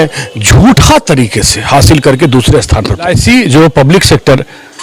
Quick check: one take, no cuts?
no; 1 cut; at 3.2 s

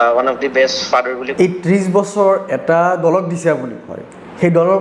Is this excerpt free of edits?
no; 1 cut; at 1.3 s

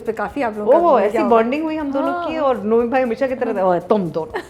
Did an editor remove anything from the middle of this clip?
no; 0 cuts

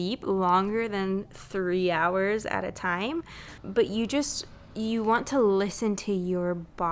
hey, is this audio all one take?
yes; 0 cuts

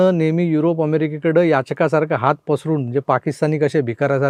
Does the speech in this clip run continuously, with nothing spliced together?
yes; 0 cuts

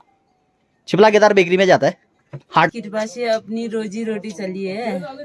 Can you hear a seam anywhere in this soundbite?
yes; 1 cut; at 2.7 s

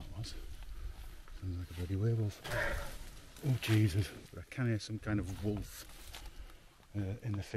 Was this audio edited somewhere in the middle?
yes; 2 cuts; at 2.4 s, 4.1 s

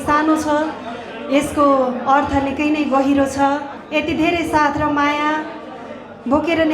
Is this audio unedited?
no; 1 cut; at 3.8 s

